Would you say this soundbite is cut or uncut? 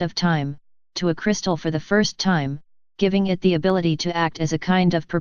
cut